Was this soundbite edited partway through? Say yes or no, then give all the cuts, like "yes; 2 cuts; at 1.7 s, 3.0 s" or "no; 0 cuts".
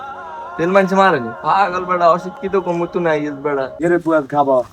yes; 1 cut; at 3.7 s